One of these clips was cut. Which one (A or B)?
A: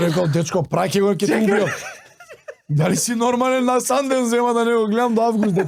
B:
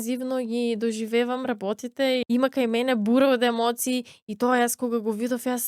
B